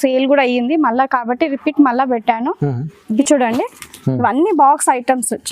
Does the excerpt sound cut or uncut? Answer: cut